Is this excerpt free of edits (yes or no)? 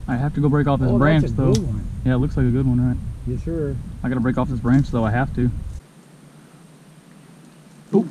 no